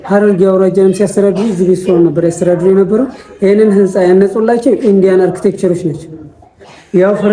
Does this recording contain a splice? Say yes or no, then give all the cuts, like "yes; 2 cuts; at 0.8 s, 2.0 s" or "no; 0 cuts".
no; 0 cuts